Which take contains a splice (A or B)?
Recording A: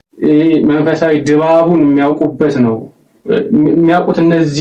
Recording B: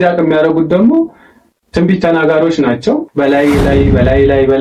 B